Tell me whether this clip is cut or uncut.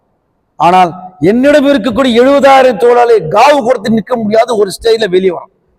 uncut